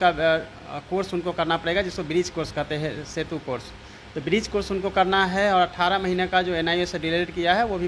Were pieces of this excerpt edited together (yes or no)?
no